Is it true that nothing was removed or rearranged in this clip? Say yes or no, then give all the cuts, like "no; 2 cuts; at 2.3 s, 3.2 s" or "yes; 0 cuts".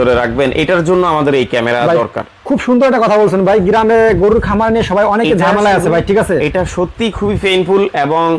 yes; 0 cuts